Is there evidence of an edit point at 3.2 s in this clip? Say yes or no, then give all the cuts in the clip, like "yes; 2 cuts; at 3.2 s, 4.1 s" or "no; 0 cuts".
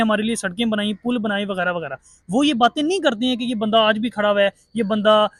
no; 0 cuts